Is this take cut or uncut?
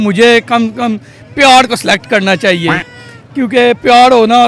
uncut